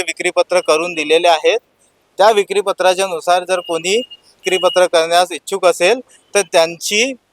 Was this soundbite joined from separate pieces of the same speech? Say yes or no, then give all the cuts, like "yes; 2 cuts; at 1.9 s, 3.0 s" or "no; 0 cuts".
yes; 1 cut; at 4.4 s